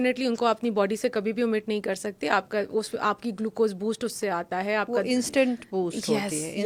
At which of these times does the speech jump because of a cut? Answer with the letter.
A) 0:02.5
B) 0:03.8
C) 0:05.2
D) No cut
D